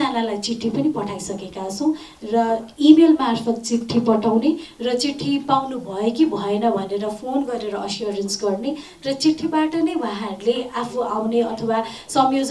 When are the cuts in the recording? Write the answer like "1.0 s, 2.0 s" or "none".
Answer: none